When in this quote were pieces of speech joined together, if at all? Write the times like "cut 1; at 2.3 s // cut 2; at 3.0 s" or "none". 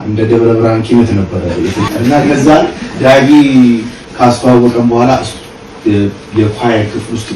cut 1; at 1.9 s // cut 2; at 4.0 s